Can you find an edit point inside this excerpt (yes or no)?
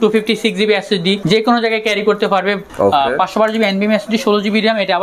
yes